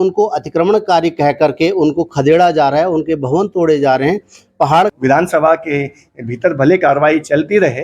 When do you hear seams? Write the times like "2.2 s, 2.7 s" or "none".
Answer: 4.9 s

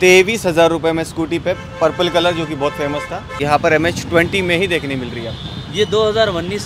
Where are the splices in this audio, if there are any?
3.4 s

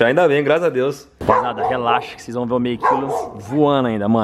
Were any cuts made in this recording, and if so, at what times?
1.1 s

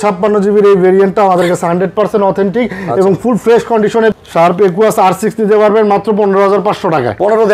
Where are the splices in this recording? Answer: 4.1 s

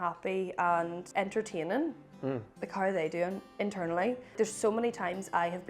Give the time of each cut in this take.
1.0 s, 2.6 s, 4.3 s

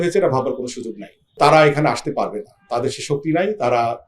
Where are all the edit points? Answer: 1.4 s

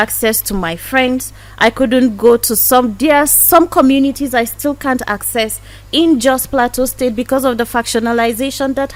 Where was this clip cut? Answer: none

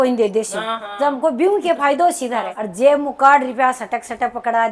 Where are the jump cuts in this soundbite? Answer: 2.6 s

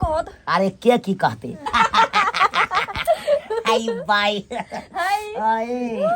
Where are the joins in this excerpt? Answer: 1.7 s

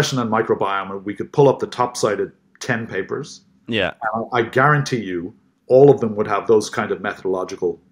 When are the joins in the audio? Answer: none

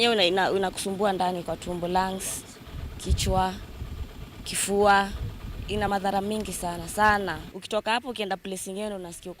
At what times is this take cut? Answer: 5.9 s

